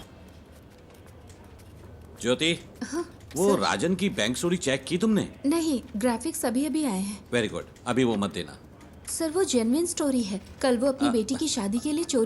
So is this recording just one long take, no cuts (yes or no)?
yes